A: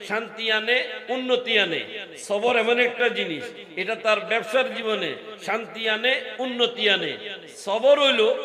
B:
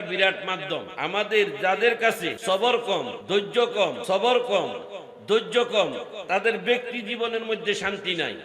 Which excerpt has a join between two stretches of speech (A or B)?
B